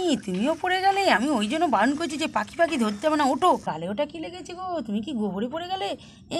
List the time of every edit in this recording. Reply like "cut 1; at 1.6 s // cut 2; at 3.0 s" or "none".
cut 1; at 3.6 s